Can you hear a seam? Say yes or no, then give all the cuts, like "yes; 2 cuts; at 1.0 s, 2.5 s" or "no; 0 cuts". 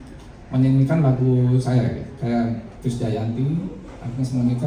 no; 0 cuts